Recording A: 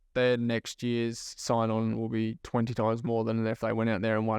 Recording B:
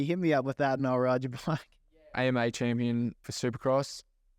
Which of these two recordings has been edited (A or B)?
B